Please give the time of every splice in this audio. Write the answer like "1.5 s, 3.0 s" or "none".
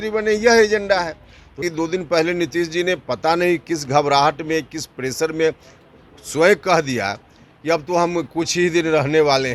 1.6 s